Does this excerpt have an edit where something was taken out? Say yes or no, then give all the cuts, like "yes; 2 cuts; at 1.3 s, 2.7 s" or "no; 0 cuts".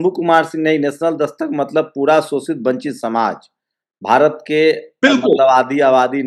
no; 0 cuts